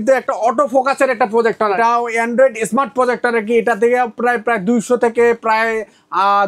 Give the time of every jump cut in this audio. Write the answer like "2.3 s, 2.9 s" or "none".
1.8 s